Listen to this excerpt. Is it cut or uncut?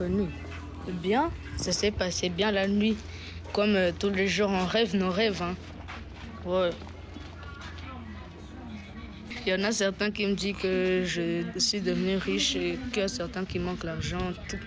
cut